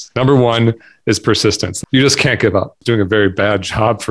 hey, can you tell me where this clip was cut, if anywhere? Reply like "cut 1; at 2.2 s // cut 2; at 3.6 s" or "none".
cut 1; at 1.7 s // cut 2; at 2.8 s

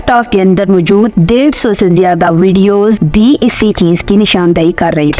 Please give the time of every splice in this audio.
none

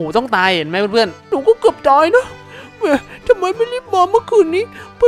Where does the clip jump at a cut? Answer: cut 1; at 1.2 s

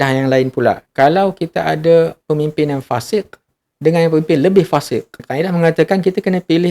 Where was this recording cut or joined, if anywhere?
cut 1; at 0.9 s // cut 2; at 5.2 s

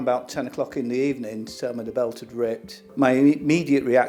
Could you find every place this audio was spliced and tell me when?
none

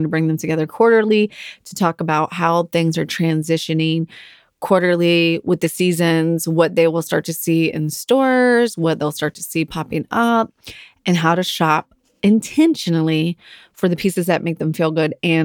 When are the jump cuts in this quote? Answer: none

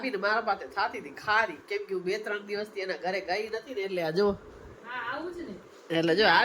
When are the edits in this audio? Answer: none

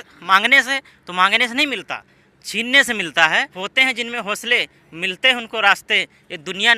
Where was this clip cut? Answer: cut 1; at 3.5 s

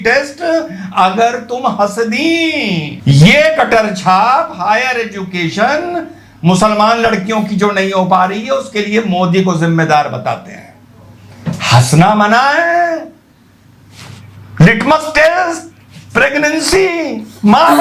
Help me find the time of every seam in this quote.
none

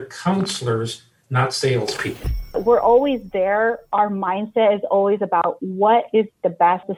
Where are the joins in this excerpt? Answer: cut 1; at 2.6 s

